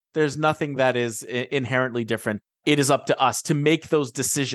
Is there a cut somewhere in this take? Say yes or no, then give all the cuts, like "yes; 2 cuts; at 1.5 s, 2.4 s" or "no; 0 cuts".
no; 0 cuts